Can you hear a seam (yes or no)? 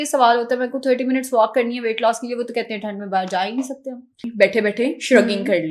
yes